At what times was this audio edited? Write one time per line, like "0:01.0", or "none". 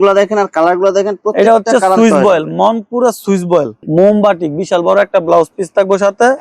0:03.8